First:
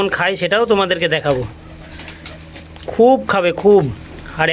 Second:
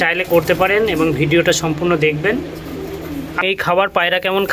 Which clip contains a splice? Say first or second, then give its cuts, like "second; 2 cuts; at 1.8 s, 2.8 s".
second; 1 cut; at 3.4 s